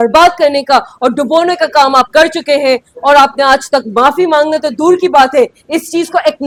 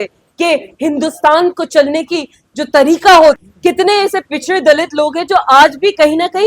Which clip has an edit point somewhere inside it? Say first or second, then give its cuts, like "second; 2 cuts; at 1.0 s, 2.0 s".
second; 1 cut; at 3.4 s